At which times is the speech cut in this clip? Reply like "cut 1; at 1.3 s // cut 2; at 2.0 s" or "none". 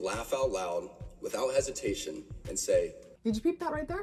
cut 1; at 3.1 s

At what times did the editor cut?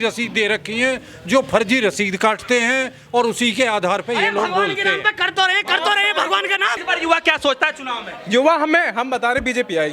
none

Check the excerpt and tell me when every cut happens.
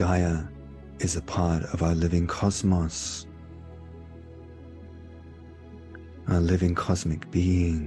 cut 1; at 3.0 s // cut 2; at 6.1 s

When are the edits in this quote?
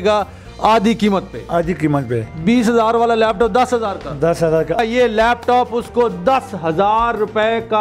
cut 1; at 4.8 s

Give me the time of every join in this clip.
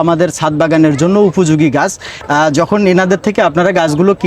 cut 1; at 2.1 s

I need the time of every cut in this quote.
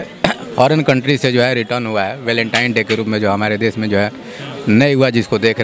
none

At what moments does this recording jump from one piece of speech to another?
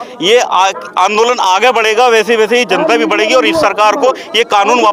none

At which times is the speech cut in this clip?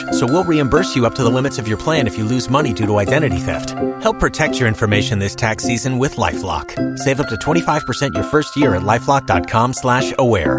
none

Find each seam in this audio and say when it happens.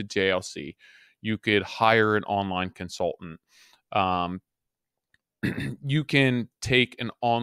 none

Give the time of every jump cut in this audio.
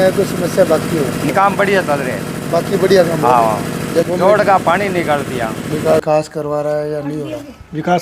cut 1; at 1.3 s // cut 2; at 4.1 s // cut 3; at 6.0 s

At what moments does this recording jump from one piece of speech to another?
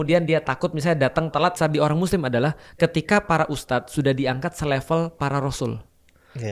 cut 1; at 1.5 s

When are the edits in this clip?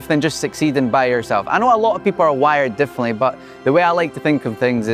none

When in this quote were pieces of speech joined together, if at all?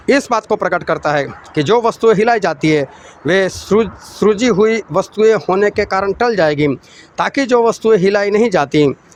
none

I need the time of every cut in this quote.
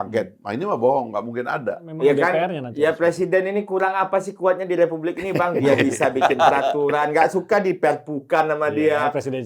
cut 1; at 1.9 s

